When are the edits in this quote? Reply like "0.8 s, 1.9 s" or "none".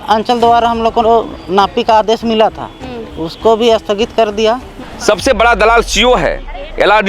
4.8 s